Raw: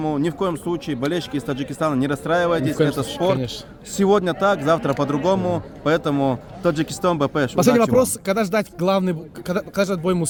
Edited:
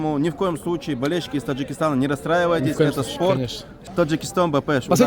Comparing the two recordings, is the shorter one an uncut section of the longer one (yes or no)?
no